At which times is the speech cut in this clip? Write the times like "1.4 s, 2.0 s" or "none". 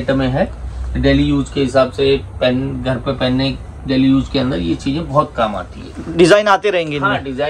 none